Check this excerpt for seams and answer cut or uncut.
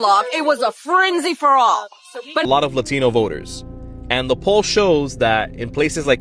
cut